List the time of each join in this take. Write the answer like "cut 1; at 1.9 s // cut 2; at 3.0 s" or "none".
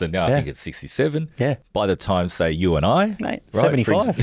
none